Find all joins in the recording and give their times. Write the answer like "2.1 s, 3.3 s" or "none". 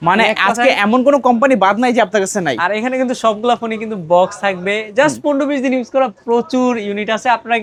none